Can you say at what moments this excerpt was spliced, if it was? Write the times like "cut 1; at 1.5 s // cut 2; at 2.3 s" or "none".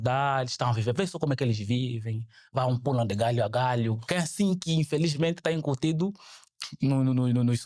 none